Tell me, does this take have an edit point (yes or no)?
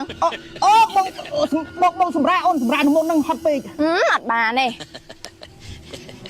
yes